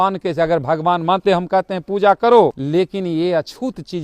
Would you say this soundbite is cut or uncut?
cut